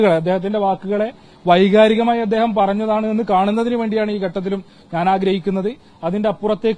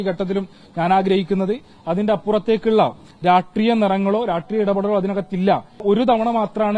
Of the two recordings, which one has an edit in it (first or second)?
second